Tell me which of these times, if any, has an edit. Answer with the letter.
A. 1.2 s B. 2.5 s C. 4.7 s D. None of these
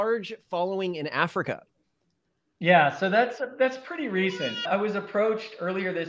C